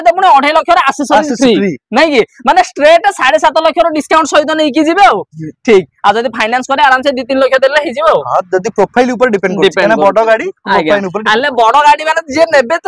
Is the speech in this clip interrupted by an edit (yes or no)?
no